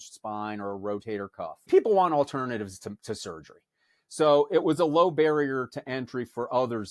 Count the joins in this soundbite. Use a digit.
1